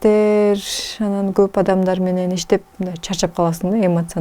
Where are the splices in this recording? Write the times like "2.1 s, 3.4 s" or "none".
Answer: none

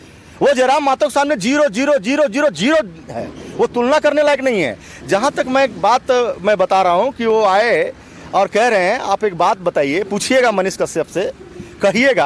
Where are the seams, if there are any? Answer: none

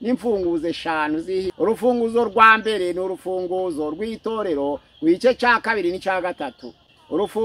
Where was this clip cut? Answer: 1.5 s

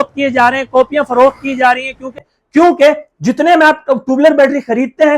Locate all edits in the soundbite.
2.2 s

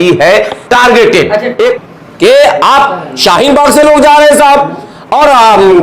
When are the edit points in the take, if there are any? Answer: 1.8 s

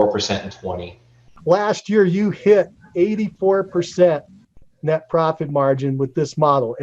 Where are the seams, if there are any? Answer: 1.3 s

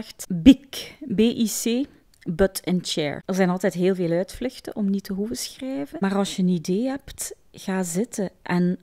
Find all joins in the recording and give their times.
none

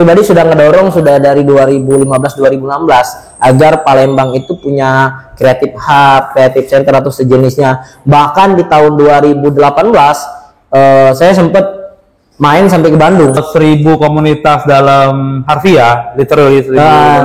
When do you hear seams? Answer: 13.4 s

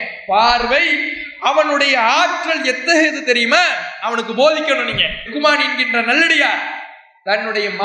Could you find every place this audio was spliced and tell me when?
none

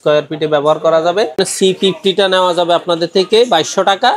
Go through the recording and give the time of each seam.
1.3 s

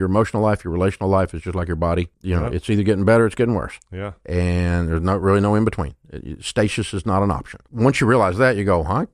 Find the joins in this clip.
2.2 s, 7.6 s

